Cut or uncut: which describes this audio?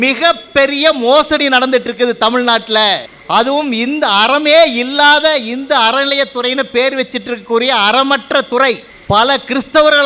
cut